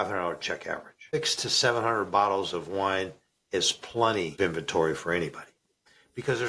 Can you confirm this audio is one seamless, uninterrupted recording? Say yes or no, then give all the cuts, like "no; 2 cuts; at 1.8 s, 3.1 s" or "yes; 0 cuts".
no; 2 cuts; at 1.1 s, 4.3 s